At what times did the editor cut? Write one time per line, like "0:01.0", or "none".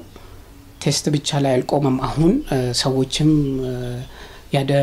none

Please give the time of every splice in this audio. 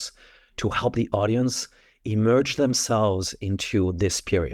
none

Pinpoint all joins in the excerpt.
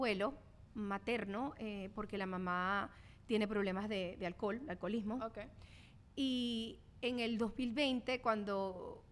none

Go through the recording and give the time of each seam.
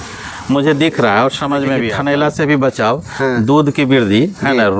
0:01.9

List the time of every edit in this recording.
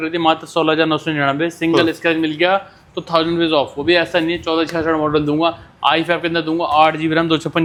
none

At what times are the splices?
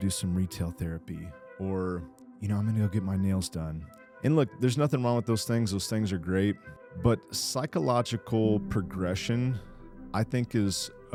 none

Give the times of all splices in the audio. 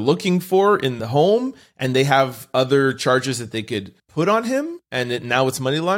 0:01.0
0:04.0
0:04.8

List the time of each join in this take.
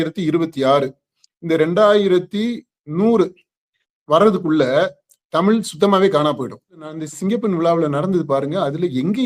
0:07.0

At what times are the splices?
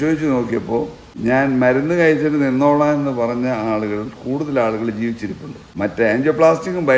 0:01.0
0:05.5

